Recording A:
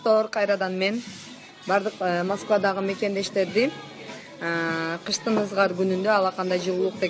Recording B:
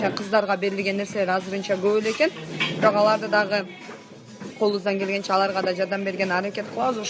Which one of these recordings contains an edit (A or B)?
A